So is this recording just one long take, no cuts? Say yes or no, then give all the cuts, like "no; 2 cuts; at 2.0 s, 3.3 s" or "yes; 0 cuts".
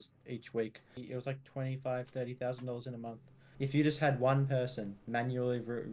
no; 2 cuts; at 0.9 s, 3.4 s